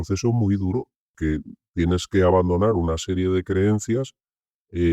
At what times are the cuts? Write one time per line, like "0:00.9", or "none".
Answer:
0:01.1

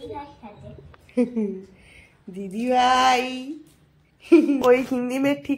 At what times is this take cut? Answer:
0:04.6

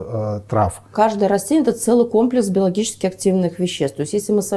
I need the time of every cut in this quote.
0:00.9

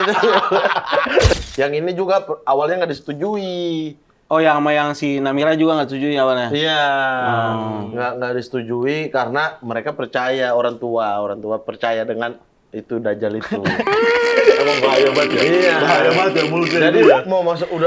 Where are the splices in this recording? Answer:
0:01.3

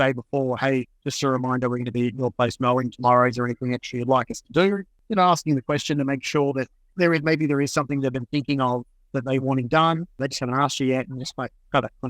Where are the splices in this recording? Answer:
0:06.8
0:09.4
0:10.2

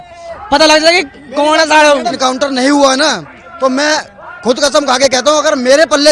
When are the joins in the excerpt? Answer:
0:02.2

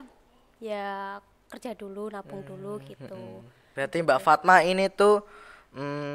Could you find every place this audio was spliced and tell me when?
0:03.7

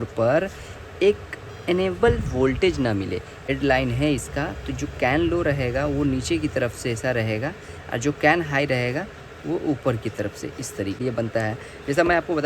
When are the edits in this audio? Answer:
0:03.5
0:11.0

